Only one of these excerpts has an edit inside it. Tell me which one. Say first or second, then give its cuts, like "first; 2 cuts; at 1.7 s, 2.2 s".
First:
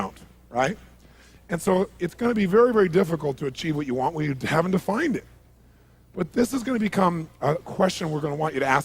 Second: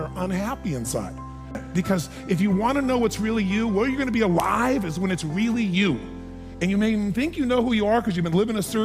second; 1 cut; at 4.3 s